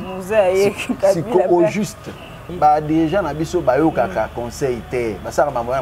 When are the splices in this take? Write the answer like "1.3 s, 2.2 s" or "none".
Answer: 2.5 s